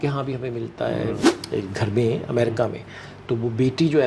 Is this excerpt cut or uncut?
cut